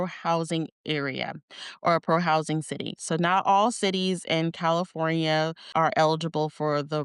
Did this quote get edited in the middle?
no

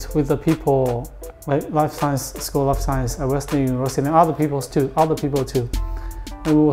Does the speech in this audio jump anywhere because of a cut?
yes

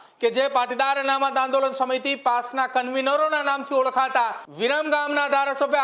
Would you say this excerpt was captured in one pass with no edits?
no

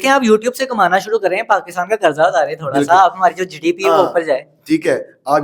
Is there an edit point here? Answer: no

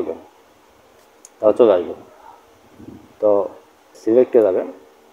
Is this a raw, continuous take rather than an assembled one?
no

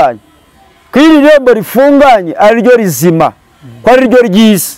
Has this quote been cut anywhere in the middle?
no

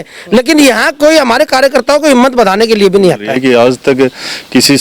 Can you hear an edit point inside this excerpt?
yes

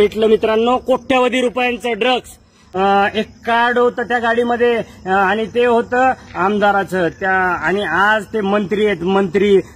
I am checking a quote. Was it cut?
yes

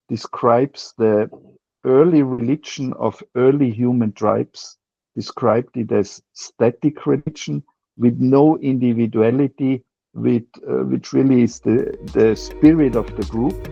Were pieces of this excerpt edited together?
no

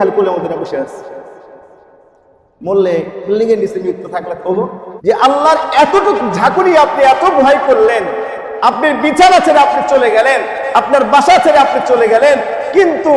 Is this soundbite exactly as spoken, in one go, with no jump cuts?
no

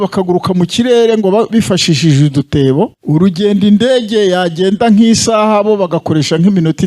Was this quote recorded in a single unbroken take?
no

